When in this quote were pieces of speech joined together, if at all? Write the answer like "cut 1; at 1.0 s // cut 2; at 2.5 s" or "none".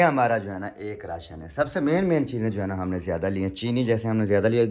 none